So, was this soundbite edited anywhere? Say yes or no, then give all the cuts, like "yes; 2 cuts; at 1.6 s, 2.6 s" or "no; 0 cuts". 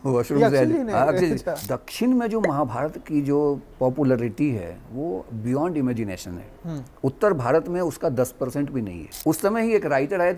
yes; 2 cuts; at 1.6 s, 9.0 s